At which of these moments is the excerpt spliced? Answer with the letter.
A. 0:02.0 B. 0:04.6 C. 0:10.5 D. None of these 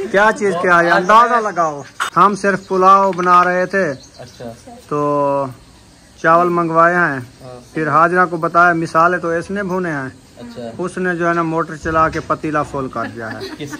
A